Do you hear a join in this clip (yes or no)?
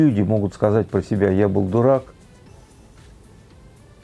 no